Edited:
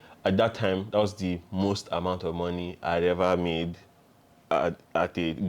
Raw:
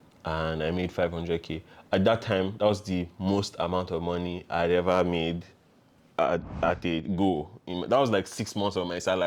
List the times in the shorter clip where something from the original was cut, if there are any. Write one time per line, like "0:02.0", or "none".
none